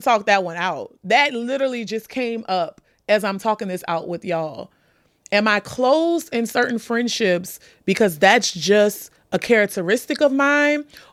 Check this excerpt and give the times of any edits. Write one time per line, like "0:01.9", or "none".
none